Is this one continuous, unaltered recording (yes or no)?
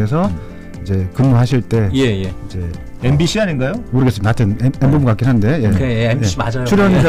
yes